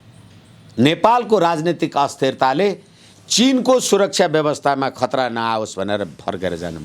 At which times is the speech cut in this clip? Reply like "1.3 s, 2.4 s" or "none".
none